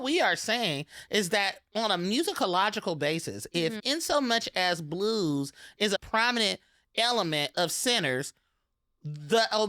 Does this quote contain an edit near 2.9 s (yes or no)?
no